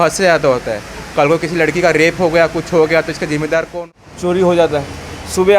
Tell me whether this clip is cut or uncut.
cut